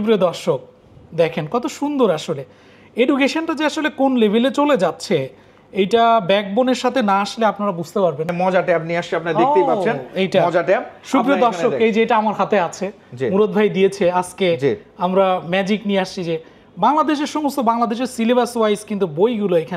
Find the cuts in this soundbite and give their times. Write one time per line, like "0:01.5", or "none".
0:08.3